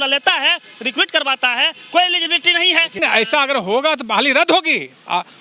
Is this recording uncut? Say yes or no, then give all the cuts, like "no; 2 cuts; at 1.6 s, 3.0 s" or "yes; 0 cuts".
no; 1 cut; at 2.9 s